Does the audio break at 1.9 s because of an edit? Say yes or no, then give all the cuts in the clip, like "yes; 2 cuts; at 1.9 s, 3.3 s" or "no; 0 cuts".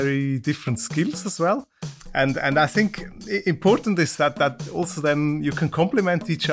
yes; 1 cut; at 1.9 s